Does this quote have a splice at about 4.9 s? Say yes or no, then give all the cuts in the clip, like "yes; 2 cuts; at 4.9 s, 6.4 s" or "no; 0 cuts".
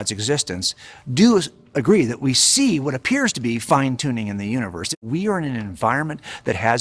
yes; 1 cut; at 4.9 s